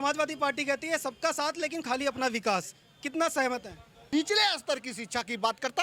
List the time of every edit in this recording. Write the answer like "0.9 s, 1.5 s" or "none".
4.1 s